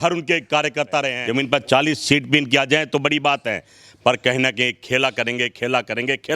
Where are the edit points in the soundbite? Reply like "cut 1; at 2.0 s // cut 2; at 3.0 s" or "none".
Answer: cut 1; at 1.2 s